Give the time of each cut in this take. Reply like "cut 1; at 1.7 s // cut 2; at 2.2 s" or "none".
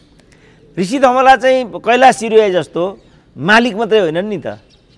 none

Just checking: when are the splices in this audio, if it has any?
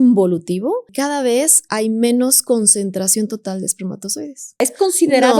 cut 1; at 1.2 s // cut 2; at 4.6 s

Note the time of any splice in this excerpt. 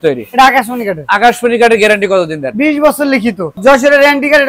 cut 1; at 3.5 s

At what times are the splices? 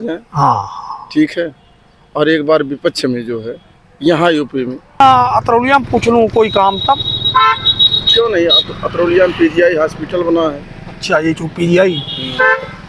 cut 1; at 5.0 s

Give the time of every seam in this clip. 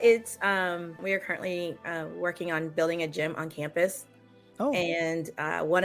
cut 1; at 1.0 s

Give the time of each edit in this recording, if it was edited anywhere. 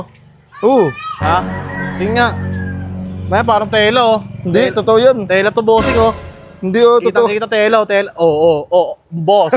none

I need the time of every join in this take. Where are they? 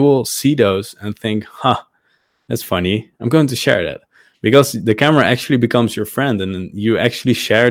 none

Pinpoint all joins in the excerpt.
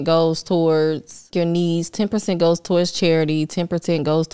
cut 1; at 1.3 s

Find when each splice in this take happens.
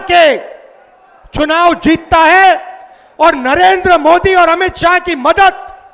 none

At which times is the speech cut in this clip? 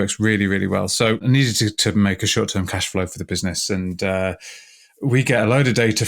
cut 1; at 1.2 s

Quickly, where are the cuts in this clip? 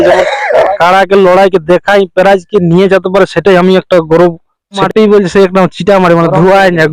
cut 1; at 4.8 s

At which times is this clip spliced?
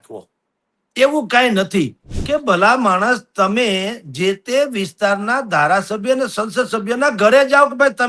cut 1; at 2.1 s

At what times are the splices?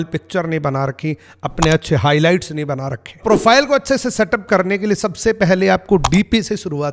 none

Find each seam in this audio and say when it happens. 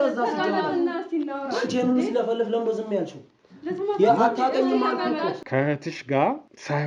cut 1; at 5.4 s

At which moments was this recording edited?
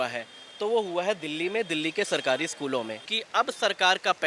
cut 1; at 3.2 s

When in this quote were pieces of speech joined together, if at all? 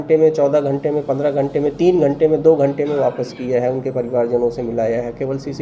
none

